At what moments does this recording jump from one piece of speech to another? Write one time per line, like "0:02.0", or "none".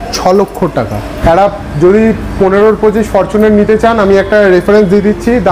0:01.0